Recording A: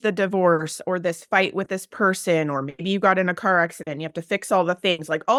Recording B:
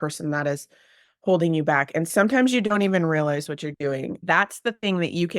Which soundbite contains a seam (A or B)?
B